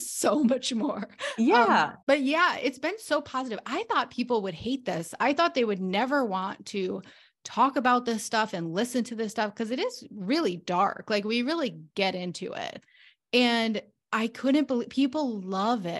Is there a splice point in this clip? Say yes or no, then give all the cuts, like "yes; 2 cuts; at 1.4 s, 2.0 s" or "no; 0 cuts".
yes; 1 cut; at 1.9 s